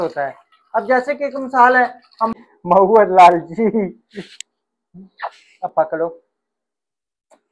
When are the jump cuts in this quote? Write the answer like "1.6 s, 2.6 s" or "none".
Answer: 2.2 s